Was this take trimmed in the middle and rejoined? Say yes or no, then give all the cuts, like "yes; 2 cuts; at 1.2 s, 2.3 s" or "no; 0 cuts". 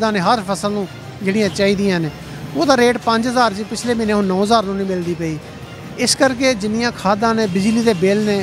no; 0 cuts